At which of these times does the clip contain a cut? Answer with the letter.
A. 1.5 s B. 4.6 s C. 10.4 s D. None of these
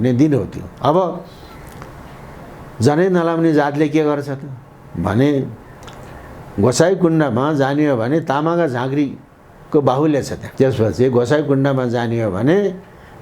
C